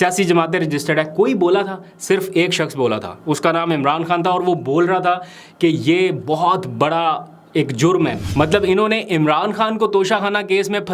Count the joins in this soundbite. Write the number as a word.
one